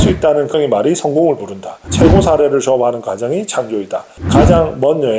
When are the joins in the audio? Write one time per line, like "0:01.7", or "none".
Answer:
0:01.8